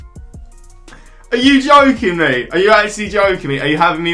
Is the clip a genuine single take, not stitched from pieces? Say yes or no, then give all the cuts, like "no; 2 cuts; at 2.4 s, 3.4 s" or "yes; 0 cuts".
no; 1 cut; at 0.9 s